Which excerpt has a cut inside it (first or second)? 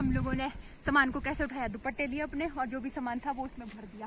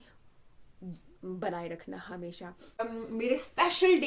second